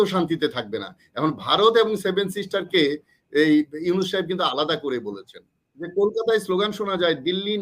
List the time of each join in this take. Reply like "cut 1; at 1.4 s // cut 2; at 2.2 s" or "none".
cut 1; at 5.9 s